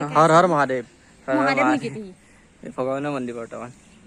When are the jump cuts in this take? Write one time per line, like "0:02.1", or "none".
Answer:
none